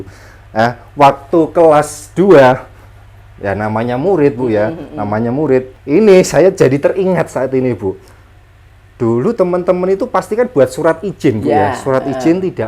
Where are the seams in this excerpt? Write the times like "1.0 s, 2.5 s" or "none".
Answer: 5.8 s

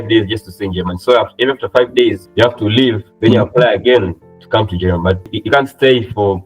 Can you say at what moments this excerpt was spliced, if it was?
2.2 s, 3.1 s, 5.3 s

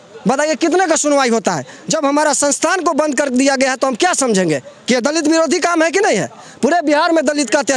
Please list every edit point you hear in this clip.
none

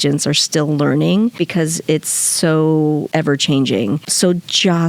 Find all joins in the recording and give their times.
1.4 s, 3.1 s, 4.1 s

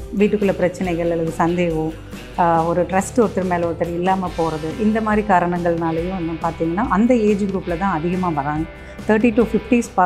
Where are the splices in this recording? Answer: none

